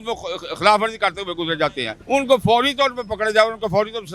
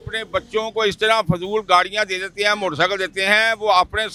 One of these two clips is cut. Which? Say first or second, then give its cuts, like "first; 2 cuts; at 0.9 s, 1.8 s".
first; 1 cut; at 1.9 s